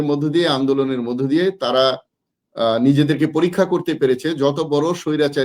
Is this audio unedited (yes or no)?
yes